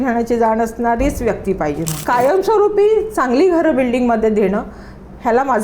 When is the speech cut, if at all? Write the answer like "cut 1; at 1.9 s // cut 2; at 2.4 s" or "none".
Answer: cut 1; at 2.0 s

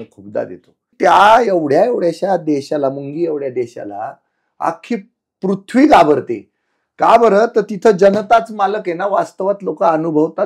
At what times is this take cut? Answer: cut 1; at 0.9 s

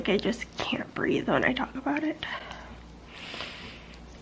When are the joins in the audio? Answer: none

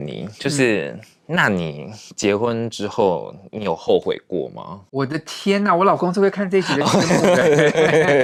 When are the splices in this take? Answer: none

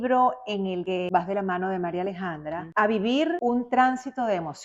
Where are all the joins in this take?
cut 1; at 0.9 s // cut 2; at 2.6 s // cut 3; at 3.4 s

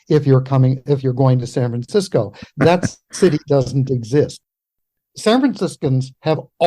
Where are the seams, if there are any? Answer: cut 1; at 4.4 s

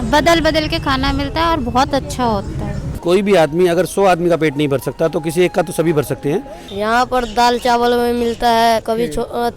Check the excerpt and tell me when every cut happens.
cut 1; at 2.9 s // cut 2; at 6.6 s // cut 3; at 8.8 s

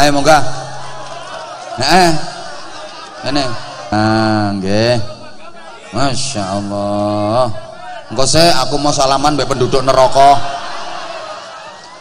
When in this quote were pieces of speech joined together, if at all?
cut 1; at 3.9 s

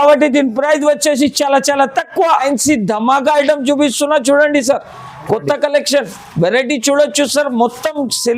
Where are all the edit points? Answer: cut 1; at 2.4 s

